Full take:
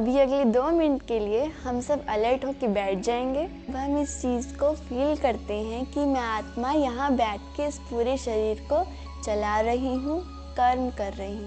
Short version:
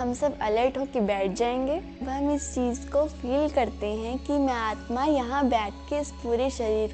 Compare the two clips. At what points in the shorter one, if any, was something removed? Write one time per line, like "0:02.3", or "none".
none